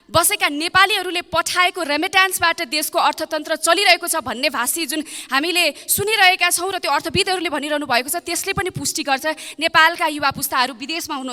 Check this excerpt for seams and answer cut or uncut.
uncut